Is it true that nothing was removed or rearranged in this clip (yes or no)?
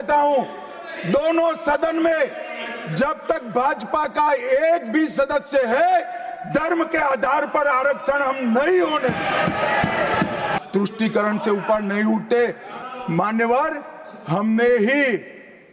no